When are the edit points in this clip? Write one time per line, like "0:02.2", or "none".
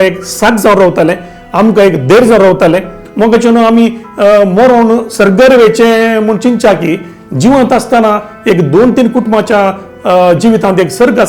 0:03.0